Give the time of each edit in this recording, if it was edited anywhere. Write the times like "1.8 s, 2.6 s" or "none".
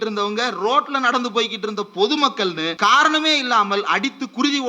2.7 s